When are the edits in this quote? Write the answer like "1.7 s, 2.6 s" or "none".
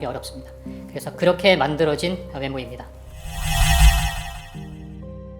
3.1 s, 4.4 s

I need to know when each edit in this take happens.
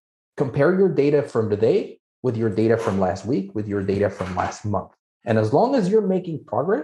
none

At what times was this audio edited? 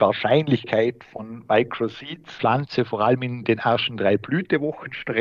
2.2 s

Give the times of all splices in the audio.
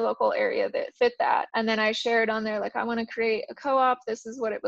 1.5 s

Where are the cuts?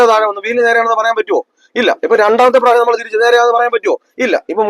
none

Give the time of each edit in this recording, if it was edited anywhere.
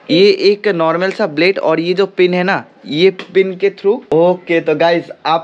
4.0 s

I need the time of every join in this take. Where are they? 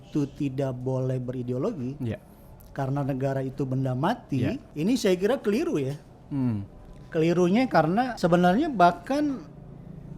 4.7 s, 8.1 s

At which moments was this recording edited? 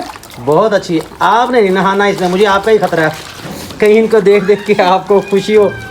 none

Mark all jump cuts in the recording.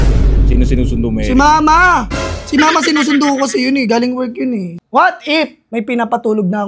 4.7 s, 5.6 s

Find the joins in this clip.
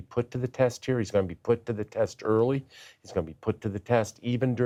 none

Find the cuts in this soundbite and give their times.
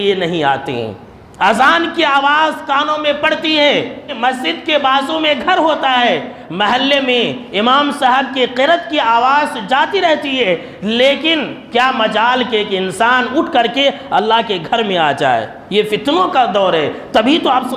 4.1 s

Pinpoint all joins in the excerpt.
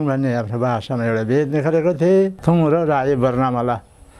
2.4 s

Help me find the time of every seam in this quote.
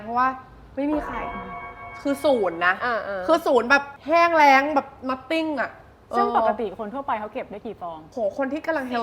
none

